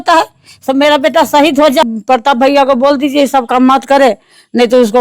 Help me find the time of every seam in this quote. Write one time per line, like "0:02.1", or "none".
0:01.8